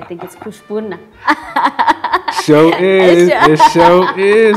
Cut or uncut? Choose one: uncut